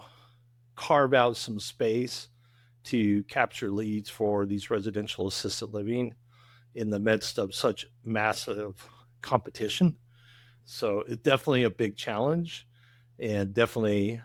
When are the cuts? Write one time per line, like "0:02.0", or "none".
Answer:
none